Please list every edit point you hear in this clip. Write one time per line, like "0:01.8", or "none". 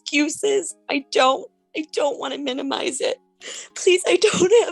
0:03.3

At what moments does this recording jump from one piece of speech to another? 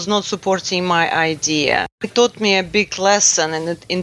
0:02.1

